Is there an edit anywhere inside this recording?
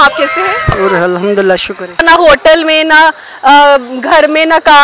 yes; 1 cut; at 2.0 s

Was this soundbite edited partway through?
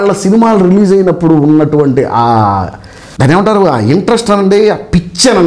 no; 0 cuts

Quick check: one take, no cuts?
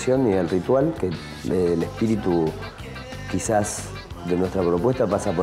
yes; 0 cuts

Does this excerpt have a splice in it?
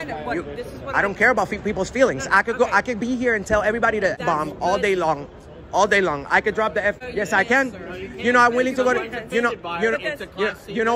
yes; 2 cuts; at 4.2 s, 7.0 s

